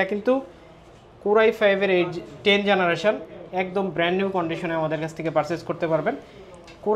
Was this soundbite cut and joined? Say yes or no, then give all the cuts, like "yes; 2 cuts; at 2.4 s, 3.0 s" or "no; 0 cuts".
no; 0 cuts